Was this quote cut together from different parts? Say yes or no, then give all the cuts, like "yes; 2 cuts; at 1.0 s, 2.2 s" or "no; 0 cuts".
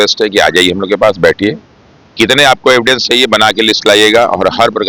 no; 0 cuts